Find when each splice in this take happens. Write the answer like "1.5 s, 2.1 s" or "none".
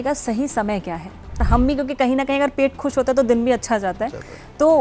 1.4 s